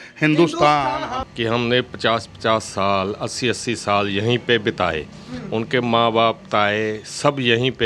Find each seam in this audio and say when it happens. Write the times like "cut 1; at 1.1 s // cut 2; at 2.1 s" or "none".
cut 1; at 1.1 s

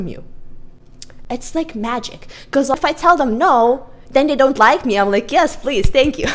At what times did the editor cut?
cut 1; at 2.7 s

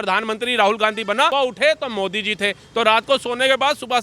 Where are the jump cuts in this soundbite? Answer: cut 1; at 1.3 s

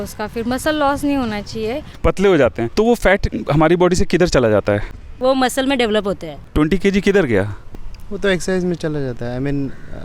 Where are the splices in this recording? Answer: cut 1; at 1.9 s // cut 2; at 5.1 s // cut 3; at 6.4 s

